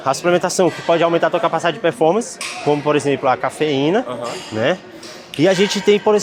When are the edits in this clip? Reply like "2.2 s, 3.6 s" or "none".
none